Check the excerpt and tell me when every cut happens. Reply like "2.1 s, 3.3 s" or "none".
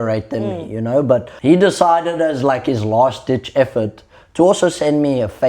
1.3 s